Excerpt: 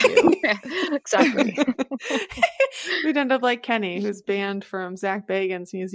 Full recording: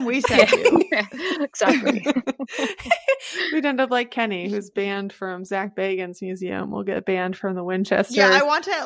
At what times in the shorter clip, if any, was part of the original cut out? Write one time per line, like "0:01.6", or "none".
none